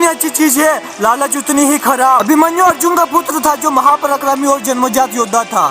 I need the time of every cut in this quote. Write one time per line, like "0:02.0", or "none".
0:02.2